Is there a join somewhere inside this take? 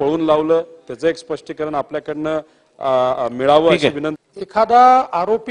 yes; 1 cut; at 4.1 s

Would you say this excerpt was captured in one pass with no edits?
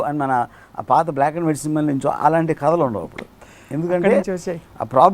yes; 0 cuts

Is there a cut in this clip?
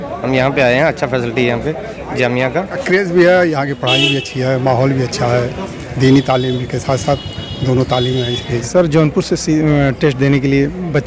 yes; 2 cuts; at 2.8 s, 8.6 s

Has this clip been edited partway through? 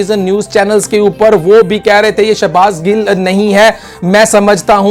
no; 0 cuts

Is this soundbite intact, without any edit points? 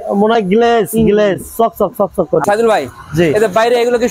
no; 1 cut; at 2.4 s

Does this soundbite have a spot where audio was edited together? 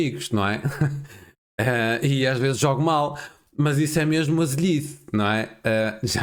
no; 0 cuts

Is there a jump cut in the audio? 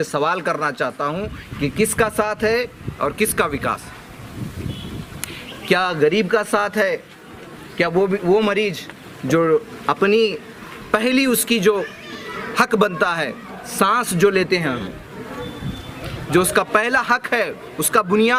no; 0 cuts

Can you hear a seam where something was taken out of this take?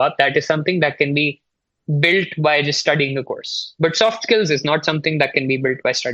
no; 0 cuts

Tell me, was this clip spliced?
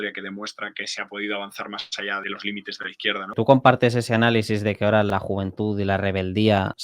yes; 3 cuts; at 2.2 s, 3.3 s, 5.1 s

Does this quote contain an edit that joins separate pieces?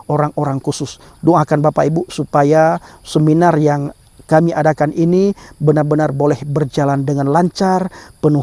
no; 0 cuts

